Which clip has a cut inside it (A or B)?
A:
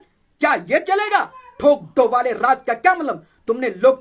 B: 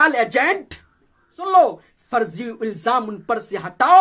B